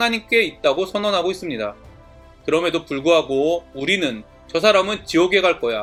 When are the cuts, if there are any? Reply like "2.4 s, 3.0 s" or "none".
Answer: none